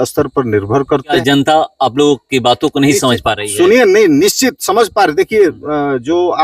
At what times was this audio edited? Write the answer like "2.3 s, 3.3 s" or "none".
1.1 s